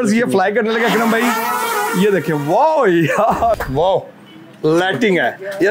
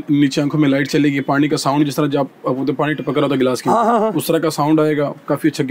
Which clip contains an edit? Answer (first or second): first